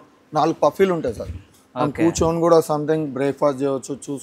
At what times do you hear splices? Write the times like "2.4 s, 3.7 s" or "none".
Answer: none